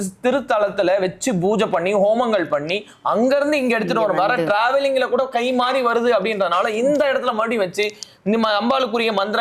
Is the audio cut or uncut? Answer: uncut